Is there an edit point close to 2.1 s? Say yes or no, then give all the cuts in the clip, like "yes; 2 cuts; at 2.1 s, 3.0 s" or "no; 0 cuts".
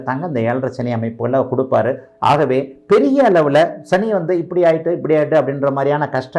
no; 0 cuts